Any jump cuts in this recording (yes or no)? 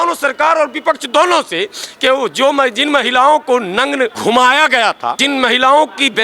yes